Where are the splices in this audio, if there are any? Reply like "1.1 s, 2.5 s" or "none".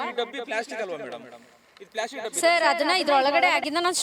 none